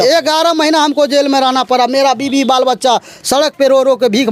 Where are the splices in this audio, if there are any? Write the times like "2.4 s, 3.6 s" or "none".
none